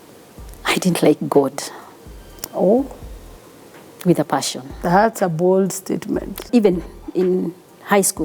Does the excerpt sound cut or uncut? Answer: cut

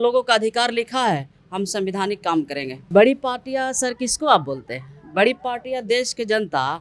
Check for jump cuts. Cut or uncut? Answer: cut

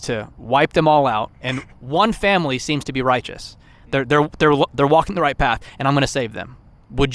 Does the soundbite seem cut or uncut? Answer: uncut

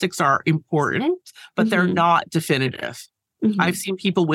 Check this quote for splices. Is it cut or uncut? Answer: uncut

